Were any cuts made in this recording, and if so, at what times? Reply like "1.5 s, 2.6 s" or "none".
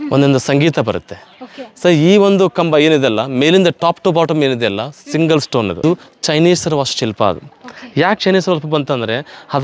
5.8 s